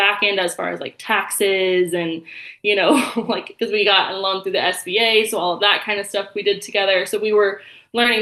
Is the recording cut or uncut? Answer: uncut